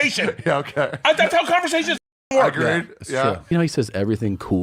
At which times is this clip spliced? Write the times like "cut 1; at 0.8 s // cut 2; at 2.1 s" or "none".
cut 1; at 3.5 s